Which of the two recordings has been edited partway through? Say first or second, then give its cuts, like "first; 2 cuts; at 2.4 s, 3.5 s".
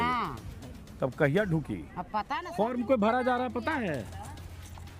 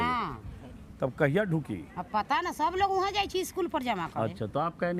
first; 1 cut; at 2.4 s